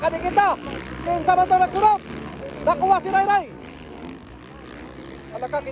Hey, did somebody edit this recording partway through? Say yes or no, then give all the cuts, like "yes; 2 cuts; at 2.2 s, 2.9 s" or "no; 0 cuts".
no; 0 cuts